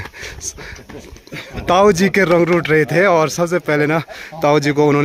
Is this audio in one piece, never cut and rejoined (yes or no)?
yes